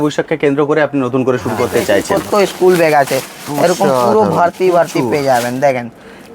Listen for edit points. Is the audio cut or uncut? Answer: cut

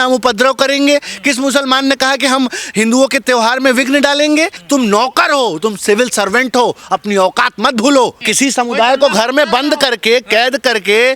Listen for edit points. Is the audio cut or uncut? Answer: cut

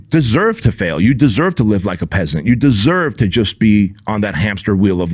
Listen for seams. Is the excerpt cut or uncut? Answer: uncut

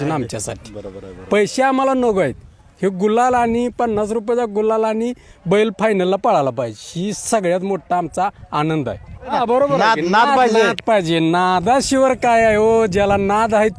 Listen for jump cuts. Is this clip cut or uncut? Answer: cut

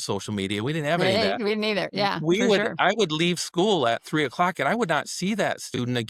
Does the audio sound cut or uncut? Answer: uncut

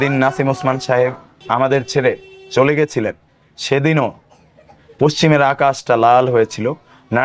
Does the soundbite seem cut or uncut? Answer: cut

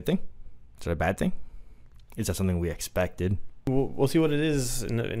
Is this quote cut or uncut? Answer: cut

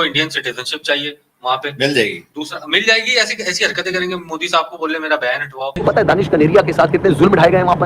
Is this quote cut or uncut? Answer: cut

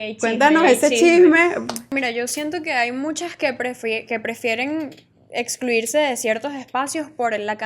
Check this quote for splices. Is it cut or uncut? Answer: cut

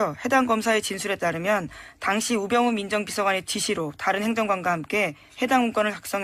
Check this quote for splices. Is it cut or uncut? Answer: cut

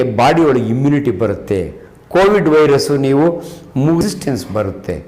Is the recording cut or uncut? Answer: cut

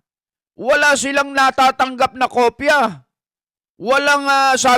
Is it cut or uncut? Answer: uncut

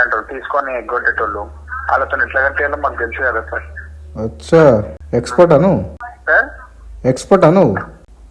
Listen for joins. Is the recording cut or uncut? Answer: uncut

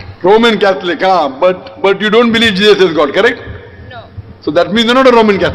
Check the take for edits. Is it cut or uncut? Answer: uncut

